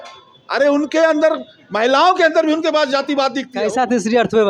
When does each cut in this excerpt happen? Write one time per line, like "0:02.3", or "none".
0:03.5